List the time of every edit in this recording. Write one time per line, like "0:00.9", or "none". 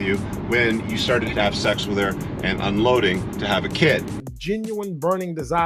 0:04.3